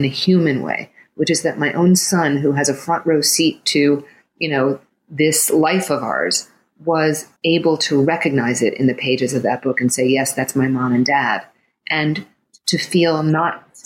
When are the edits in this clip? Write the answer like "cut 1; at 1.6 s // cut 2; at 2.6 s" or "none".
cut 1; at 7.3 s